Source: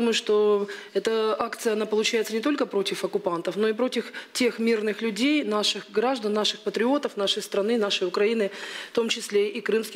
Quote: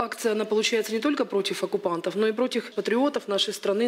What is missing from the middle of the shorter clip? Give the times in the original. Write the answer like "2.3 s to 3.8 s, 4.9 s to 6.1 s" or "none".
4.1 s to 6.6 s

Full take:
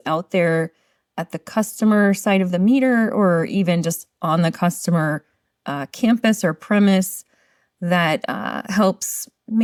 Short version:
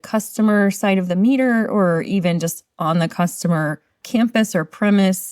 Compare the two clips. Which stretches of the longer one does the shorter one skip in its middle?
5.4 s to 5.8 s

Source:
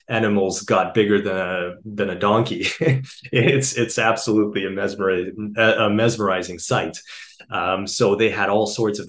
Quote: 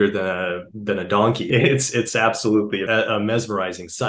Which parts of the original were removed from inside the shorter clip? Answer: 2.5 s to 3.3 s, 4.7 s to 5.5 s

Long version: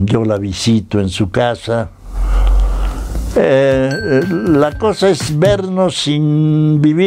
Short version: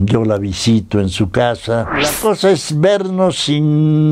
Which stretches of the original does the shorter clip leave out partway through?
2.1 s to 4.7 s

